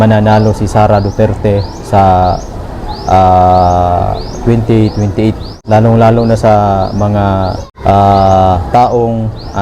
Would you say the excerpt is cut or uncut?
cut